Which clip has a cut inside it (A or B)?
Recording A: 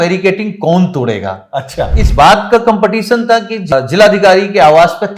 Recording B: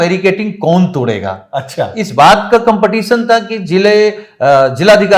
A